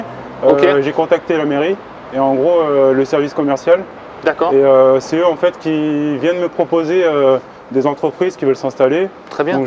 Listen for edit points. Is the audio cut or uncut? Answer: uncut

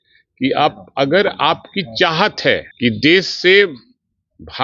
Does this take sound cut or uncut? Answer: cut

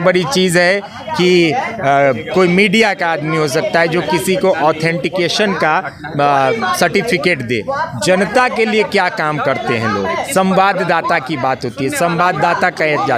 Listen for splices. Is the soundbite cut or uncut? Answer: uncut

